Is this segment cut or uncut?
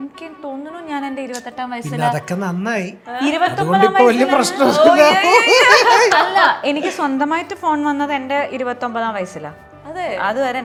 uncut